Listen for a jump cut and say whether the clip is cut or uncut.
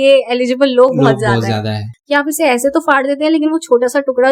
cut